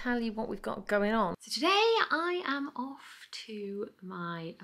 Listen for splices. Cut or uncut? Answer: cut